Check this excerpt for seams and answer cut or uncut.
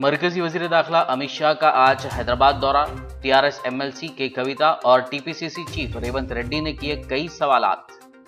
uncut